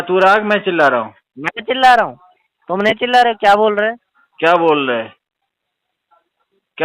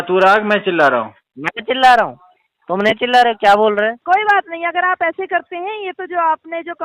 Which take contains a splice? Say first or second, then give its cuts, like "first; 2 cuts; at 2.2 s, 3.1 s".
second; 1 cut; at 4.0 s